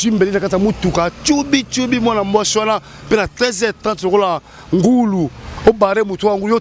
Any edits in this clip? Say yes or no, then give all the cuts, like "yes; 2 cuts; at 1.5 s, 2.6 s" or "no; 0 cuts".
no; 0 cuts